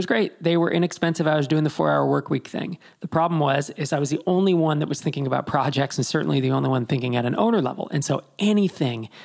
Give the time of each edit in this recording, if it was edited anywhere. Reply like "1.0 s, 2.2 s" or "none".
none